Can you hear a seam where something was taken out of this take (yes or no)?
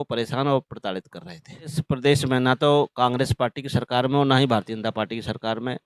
yes